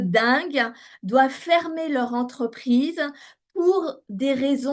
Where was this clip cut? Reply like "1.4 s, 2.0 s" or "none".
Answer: none